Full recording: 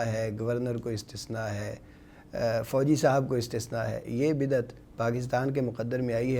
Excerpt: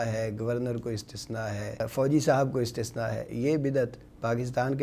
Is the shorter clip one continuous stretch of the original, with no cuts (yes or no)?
no